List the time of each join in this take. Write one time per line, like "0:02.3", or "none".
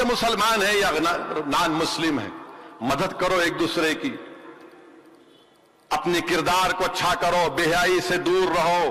none

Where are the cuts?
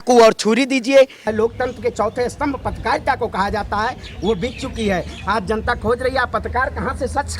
0:01.2

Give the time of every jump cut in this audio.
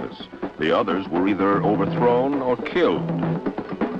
0:01.3

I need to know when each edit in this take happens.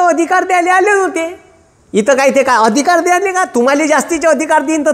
none

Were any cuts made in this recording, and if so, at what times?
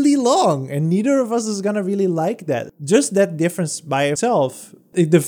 0:02.7

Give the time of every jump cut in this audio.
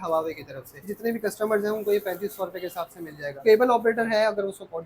0:00.9
0:03.4

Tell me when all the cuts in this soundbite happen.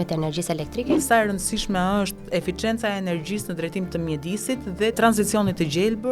0:01.0
0:05.0

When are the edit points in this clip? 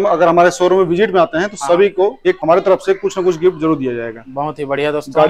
0:02.3

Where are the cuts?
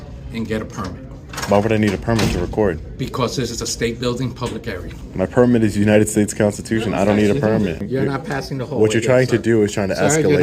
0:05.0
0:07.8

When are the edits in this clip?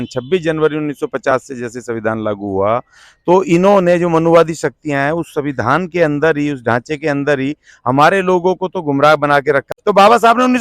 0:09.6

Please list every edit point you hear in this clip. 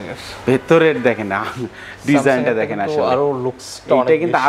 none

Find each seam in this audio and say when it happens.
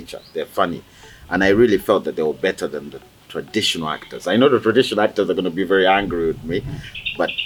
none

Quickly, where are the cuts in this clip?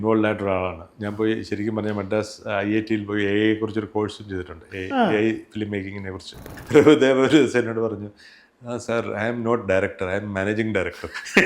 0:06.6

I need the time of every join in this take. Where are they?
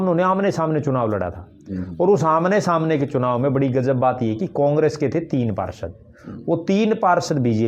none

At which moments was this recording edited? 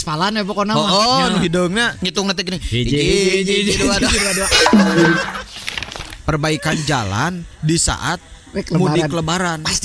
0:05.5

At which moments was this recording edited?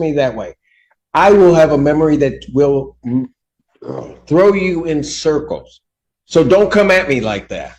none

